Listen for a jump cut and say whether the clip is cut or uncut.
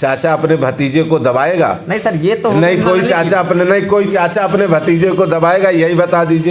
uncut